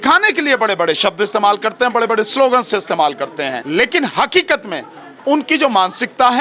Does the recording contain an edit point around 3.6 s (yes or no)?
yes